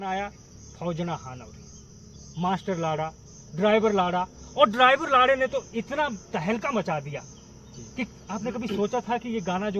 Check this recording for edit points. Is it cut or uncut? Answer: uncut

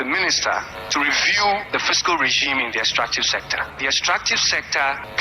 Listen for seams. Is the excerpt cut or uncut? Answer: cut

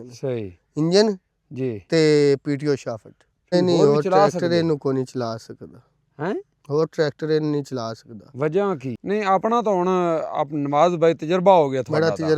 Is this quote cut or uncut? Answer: cut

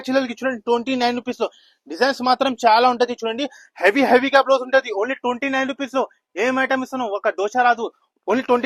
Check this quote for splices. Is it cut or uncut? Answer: uncut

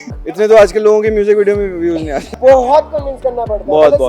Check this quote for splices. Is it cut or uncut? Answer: cut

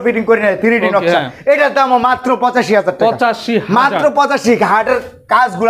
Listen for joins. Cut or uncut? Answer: uncut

